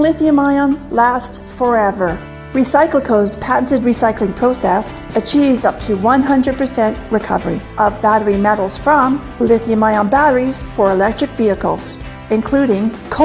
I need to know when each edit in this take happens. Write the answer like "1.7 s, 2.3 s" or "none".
1.2 s